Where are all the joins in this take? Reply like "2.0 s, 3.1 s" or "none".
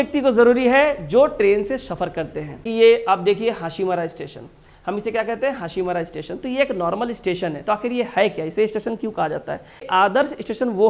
2.7 s, 9.9 s